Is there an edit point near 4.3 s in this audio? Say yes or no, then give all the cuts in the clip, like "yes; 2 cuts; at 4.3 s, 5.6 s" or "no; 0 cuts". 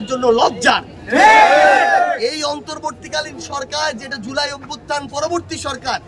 no; 0 cuts